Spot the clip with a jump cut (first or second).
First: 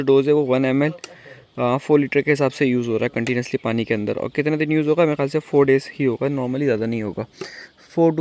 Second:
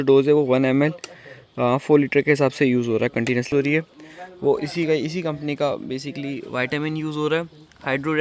second